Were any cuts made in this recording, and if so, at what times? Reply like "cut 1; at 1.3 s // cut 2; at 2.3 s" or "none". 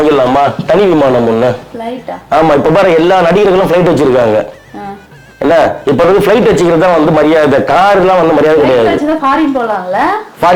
none

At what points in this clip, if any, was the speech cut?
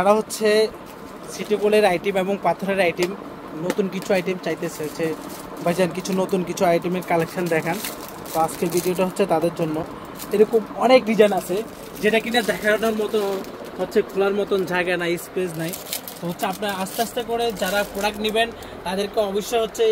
none

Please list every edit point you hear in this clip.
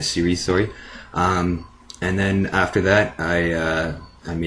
none

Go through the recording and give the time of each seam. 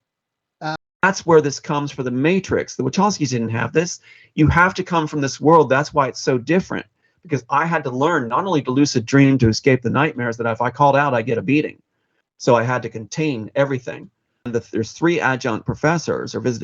cut 1; at 1.0 s // cut 2; at 14.5 s

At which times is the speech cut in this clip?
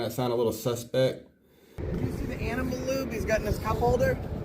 cut 1; at 1.8 s

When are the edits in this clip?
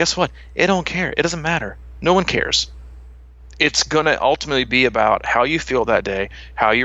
none

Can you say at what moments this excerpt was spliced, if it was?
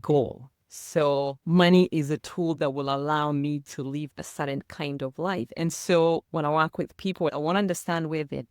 cut 1; at 1.4 s // cut 2; at 7.3 s

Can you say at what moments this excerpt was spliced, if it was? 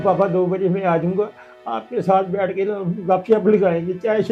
none

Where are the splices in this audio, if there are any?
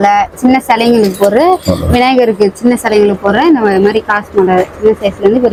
none

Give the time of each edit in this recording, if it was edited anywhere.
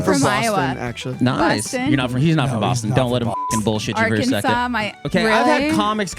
cut 1; at 5.0 s

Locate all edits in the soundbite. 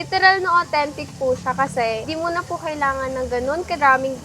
cut 1; at 2.0 s

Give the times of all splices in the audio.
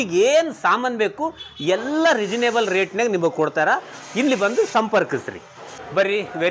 none

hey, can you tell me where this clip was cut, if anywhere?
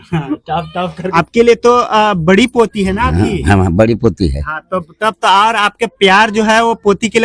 cut 1; at 1.1 s

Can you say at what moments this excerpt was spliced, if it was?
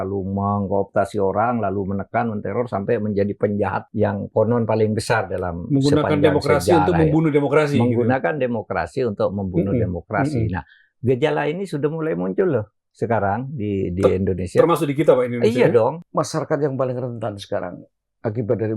cut 1; at 3.8 s // cut 2; at 16.0 s

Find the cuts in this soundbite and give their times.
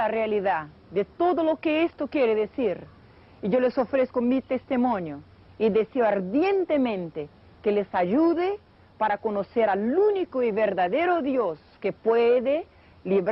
cut 1; at 9.3 s

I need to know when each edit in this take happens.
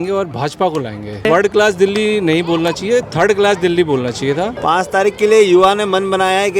cut 1; at 1.2 s // cut 2; at 4.5 s

